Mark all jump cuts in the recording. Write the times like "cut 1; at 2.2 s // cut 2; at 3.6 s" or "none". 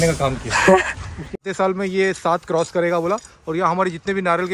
cut 1; at 1.4 s